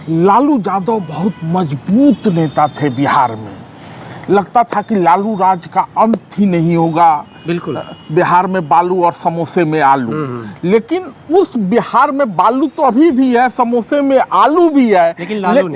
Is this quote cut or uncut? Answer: uncut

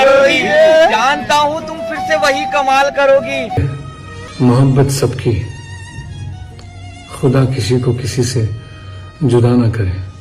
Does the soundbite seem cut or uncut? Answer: cut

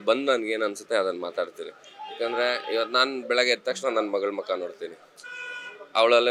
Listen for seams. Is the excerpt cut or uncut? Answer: uncut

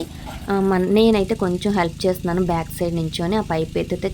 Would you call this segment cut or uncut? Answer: uncut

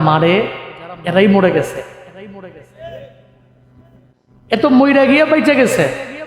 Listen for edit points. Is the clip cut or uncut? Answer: uncut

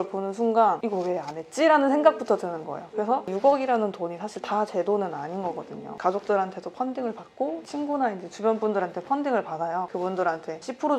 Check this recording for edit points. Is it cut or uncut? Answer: uncut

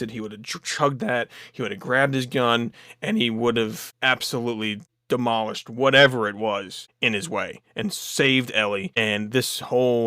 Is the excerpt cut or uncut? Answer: cut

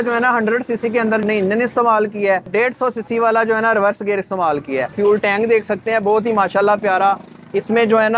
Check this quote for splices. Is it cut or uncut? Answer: cut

